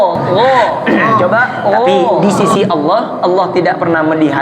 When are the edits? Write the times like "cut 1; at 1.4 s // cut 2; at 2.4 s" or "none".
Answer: cut 1; at 2.2 s